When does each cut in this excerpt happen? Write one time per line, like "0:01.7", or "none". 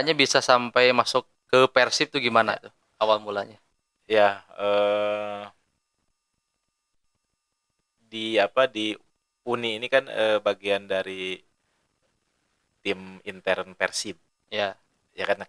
none